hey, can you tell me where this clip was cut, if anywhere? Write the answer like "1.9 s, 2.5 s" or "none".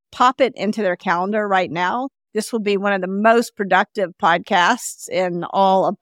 2.2 s